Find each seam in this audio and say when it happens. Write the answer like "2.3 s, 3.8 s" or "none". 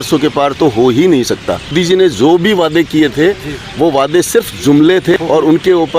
1.7 s, 5.1 s